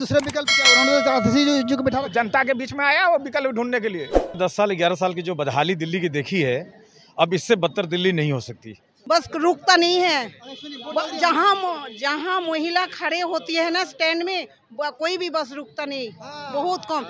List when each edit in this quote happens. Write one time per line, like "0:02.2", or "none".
0:04.4
0:08.9